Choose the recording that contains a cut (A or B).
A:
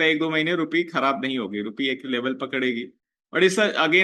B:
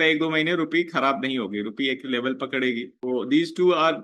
B